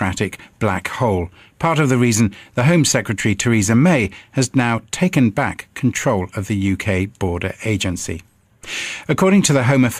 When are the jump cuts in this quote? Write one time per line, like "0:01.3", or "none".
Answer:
0:05.9